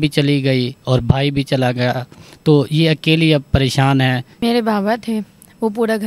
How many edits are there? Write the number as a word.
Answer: one